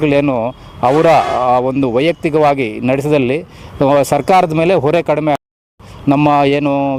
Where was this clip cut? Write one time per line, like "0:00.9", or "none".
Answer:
none